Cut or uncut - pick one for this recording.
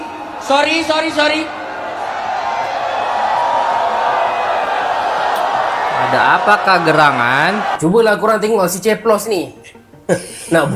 uncut